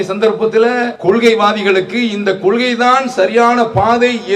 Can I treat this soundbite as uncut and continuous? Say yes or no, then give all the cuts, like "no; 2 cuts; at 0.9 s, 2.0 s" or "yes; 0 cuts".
no; 1 cut; at 0.9 s